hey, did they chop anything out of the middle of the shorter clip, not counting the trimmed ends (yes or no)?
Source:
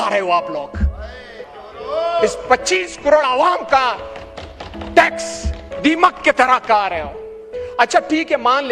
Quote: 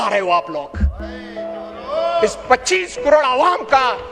no